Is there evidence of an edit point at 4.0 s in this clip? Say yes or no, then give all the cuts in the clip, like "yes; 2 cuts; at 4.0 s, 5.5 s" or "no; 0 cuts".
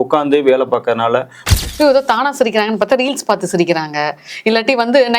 no; 1 cut; at 1.4 s